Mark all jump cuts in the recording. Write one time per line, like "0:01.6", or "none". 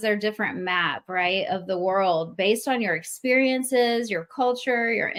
none